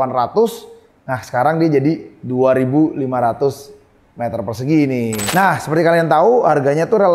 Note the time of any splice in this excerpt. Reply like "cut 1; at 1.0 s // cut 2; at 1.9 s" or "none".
cut 1; at 5.2 s